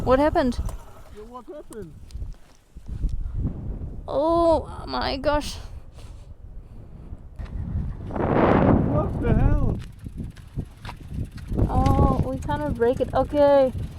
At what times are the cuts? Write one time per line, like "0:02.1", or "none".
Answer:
0:07.5